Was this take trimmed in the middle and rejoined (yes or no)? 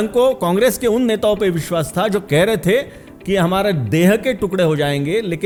no